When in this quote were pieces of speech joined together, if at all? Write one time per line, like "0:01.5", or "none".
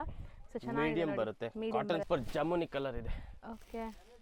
0:02.0